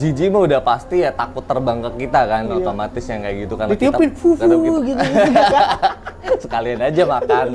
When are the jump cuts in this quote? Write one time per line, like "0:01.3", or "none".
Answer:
none